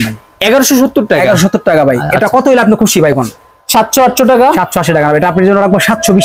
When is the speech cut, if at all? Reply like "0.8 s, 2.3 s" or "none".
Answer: none